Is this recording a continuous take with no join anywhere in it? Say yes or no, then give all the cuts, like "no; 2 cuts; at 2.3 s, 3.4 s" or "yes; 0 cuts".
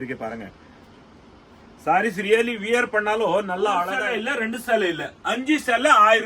no; 1 cut; at 4.0 s